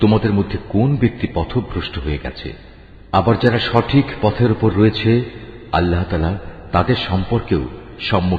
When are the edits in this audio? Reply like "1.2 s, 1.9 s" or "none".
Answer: none